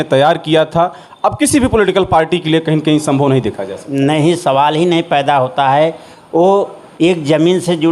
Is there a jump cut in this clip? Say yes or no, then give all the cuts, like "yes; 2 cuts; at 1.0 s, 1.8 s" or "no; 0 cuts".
no; 0 cuts